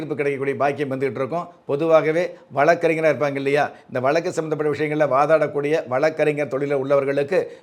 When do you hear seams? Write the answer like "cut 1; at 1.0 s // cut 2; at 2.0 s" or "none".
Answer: none